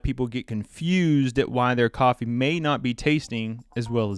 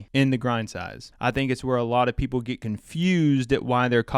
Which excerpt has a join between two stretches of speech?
second; 1 cut; at 1.1 s

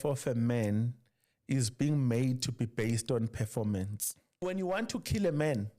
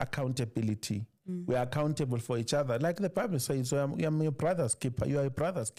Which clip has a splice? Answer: first; 1 cut; at 4.4 s

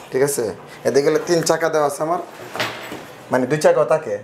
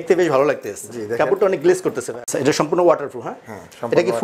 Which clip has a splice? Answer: second; 1 cut; at 2.1 s

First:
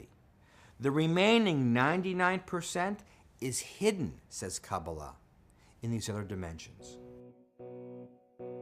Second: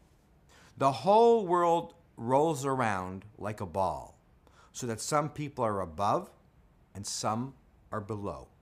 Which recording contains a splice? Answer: first; 1 cut; at 6.0 s

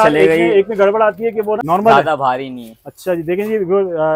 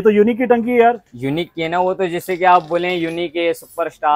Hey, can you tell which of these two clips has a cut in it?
first; 1 cut; at 1.6 s

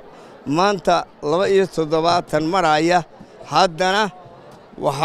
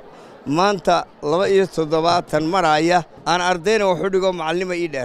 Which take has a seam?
second; 1 cut; at 3.1 s

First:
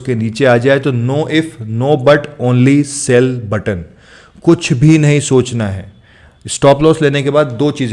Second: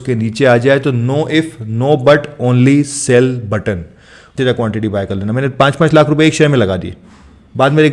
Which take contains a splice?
second; 1 cut; at 4.3 s

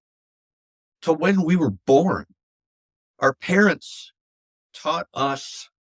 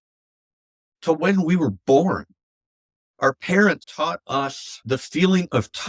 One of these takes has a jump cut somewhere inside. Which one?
second; 2 cuts; at 3.9 s, 4.8 s

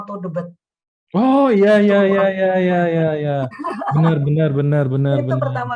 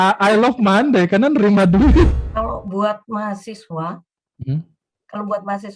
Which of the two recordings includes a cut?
second; 1 cut; at 2.1 s

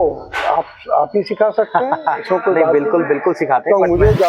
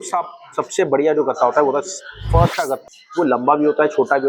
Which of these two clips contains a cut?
second; 1 cut; at 2.8 s

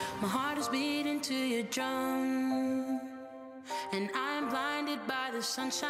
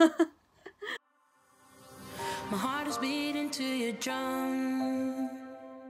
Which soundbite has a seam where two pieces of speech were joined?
second; 1 cut; at 0.9 s

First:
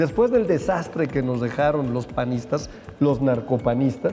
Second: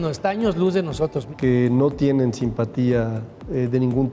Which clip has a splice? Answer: second; 1 cut; at 1.2 s

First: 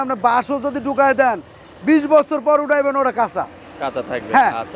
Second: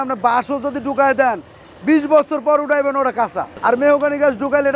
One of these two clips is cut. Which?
second; 1 cut; at 3.5 s

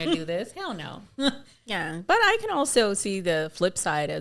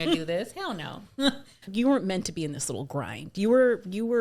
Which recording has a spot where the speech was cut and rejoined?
second; 1 cut; at 1.7 s

